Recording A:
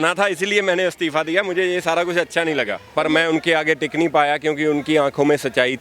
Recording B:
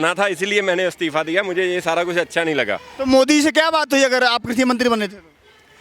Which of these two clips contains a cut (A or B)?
A